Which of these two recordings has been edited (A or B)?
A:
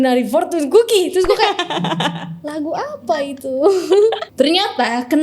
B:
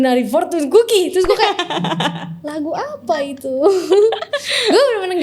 A